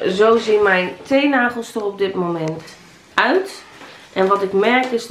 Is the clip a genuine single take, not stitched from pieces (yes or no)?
yes